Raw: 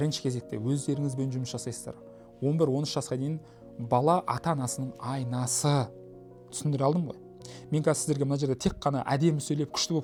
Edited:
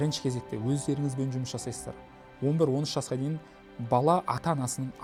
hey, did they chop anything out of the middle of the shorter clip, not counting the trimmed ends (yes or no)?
no